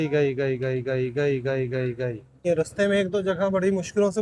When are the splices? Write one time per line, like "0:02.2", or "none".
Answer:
0:02.5